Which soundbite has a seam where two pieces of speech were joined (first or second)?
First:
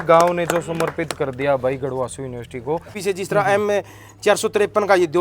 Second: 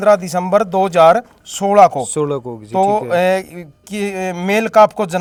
first